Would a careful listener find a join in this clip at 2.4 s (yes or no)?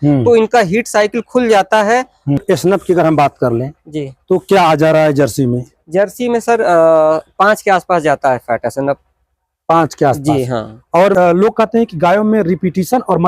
yes